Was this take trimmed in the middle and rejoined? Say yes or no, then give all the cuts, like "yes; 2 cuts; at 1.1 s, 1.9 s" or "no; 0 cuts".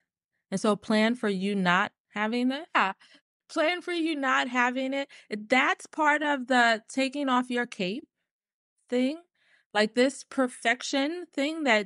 yes; 1 cut; at 2.7 s